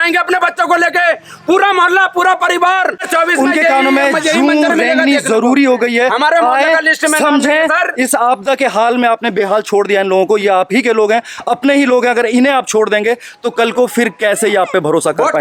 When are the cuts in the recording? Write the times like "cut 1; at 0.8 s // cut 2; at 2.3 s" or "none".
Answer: cut 1; at 3.0 s